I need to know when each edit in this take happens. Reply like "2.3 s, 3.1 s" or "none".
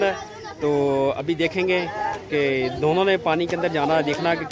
none

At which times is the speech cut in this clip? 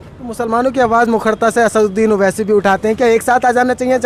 none

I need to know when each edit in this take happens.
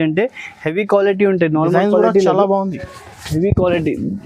none

